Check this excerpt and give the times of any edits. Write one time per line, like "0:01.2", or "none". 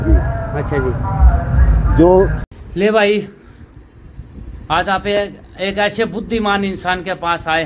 0:02.4